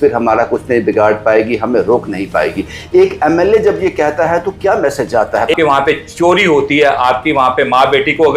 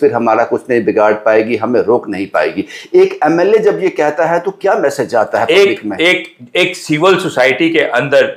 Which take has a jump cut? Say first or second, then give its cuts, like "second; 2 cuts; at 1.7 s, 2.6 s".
first; 1 cut; at 5.5 s